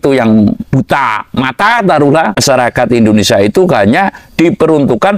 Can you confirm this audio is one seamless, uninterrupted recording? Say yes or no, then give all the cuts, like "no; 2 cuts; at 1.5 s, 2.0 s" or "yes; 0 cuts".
no; 1 cut; at 2.4 s